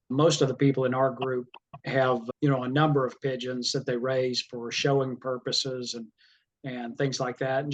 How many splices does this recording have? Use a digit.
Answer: 0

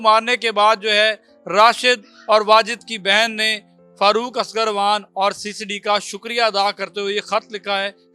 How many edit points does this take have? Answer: 0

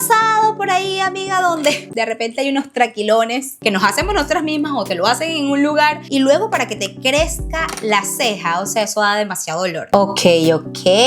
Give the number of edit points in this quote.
1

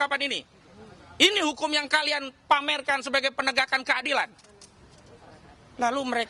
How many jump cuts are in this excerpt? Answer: 0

